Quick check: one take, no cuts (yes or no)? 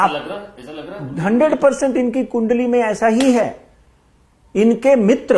yes